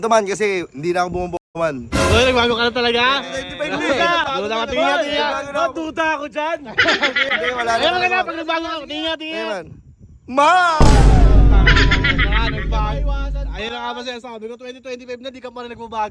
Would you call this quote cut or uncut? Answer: uncut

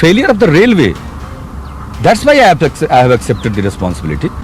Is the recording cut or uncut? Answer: uncut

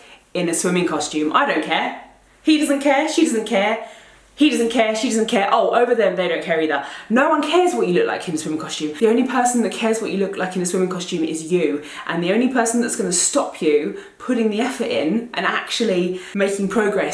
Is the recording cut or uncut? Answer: cut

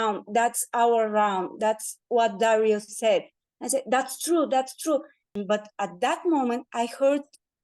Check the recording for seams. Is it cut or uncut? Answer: cut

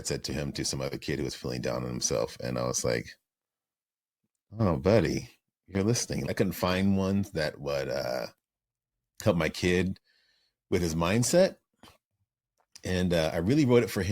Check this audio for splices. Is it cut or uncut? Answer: cut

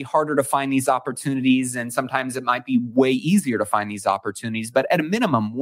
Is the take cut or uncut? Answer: uncut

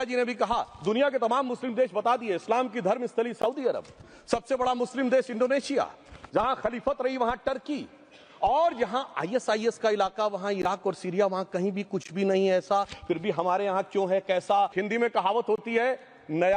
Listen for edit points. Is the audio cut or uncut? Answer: cut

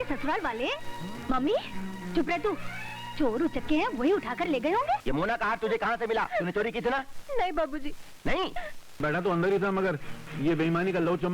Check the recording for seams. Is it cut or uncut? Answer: cut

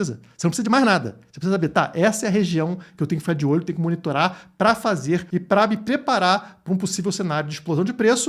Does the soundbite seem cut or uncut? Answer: cut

